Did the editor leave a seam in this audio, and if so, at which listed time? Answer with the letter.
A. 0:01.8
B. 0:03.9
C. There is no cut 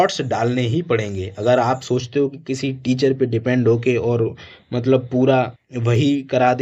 C